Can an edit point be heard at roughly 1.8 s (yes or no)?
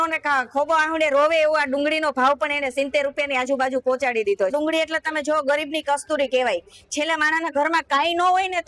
no